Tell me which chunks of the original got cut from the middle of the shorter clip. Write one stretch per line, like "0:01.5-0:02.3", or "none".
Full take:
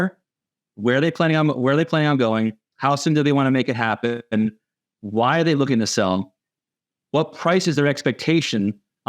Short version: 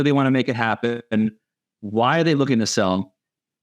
none